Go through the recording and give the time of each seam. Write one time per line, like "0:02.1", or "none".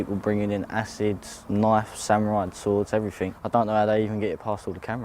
0:01.3
0:03.3